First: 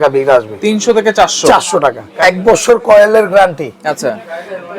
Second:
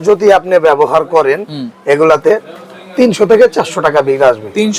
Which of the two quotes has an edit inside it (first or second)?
first